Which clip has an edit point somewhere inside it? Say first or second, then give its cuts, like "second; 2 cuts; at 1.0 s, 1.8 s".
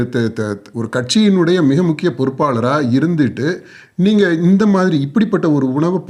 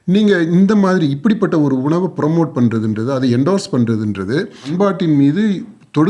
second; 1 cut; at 4.7 s